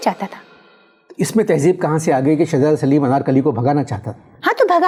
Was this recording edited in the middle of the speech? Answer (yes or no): no